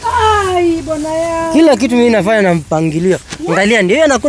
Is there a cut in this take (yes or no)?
no